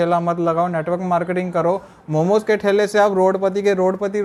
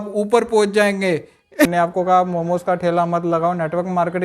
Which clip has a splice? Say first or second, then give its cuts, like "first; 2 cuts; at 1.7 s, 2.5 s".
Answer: second; 1 cut; at 1.7 s